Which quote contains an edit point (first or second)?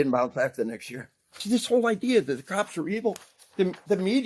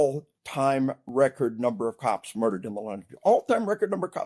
first